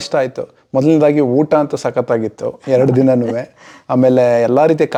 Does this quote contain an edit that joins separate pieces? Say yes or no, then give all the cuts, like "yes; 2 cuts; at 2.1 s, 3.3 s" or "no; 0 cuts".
no; 0 cuts